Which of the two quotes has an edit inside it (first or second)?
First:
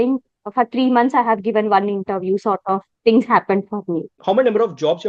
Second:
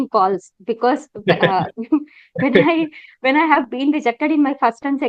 first